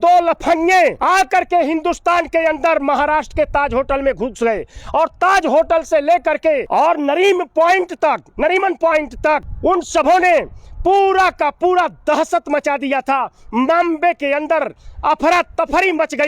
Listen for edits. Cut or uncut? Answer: cut